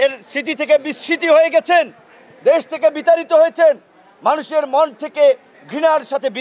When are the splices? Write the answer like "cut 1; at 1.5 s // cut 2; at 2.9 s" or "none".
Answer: none